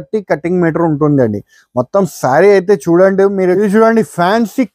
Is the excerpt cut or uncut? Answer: cut